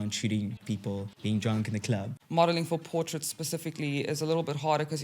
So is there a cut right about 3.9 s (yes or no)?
no